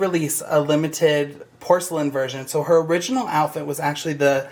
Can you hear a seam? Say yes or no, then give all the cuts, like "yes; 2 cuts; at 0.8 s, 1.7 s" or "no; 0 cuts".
no; 0 cuts